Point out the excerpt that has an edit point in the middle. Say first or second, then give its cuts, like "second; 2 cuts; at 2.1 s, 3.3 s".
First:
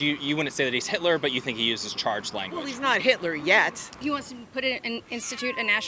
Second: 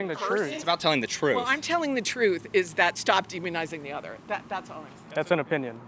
first; 1 cut; at 3.9 s